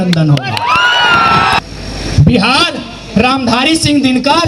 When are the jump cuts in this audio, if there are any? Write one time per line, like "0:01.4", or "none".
0:01.6